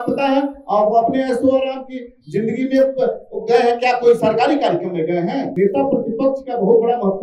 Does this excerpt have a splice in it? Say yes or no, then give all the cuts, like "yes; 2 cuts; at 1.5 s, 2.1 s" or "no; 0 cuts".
yes; 1 cut; at 5.5 s